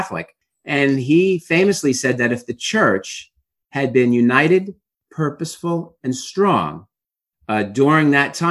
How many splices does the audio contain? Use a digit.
0